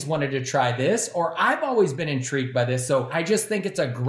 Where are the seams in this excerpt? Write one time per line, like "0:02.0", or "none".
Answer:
0:03.1